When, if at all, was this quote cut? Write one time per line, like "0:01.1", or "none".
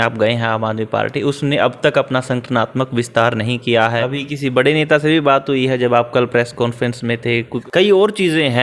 0:04.0
0:07.6